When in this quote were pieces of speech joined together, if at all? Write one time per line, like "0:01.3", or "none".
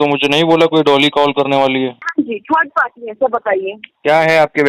0:02.0